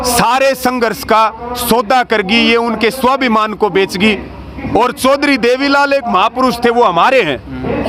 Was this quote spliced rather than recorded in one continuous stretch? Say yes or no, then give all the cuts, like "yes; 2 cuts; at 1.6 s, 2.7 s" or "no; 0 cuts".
no; 0 cuts